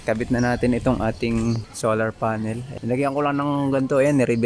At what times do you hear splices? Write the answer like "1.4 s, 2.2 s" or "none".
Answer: 1.7 s, 2.7 s